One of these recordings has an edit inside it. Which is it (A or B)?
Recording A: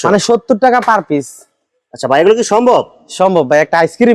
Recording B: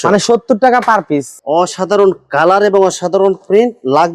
B